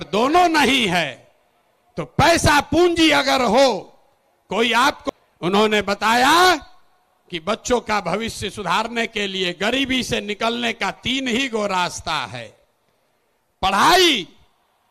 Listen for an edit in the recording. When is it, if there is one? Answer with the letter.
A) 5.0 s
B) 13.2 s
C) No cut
A